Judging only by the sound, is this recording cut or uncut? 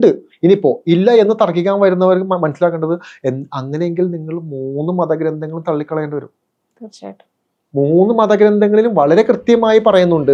uncut